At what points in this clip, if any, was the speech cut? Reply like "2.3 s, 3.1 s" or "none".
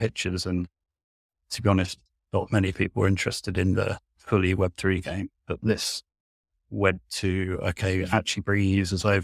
none